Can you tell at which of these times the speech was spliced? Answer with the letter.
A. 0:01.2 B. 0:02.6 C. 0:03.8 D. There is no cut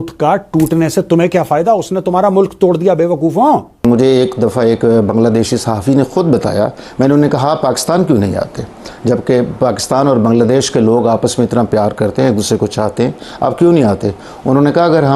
C